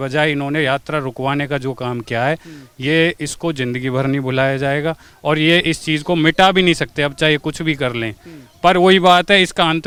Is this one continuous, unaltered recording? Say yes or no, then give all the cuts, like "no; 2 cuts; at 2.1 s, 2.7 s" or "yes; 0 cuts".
yes; 0 cuts